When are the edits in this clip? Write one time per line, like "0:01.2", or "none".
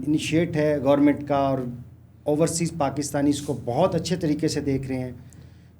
none